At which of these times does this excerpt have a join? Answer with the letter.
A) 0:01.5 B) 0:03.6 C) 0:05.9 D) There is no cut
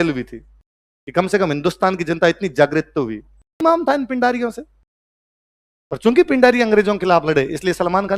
B